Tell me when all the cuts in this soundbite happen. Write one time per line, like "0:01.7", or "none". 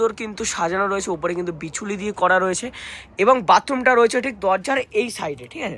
none